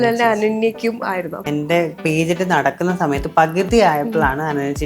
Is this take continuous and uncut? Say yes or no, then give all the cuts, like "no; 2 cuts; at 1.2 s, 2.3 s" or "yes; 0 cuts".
no; 1 cut; at 1.4 s